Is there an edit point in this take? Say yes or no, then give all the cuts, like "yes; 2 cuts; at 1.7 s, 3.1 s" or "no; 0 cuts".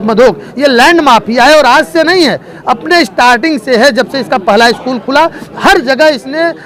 no; 0 cuts